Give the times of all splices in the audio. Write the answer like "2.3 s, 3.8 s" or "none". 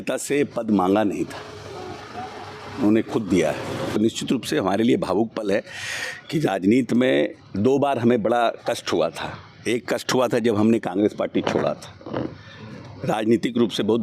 3.9 s